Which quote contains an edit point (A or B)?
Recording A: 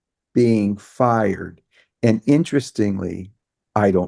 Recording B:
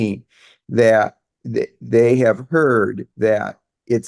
B